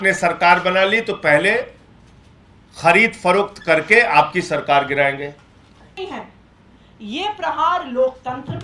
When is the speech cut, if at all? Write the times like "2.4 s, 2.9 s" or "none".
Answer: 6.0 s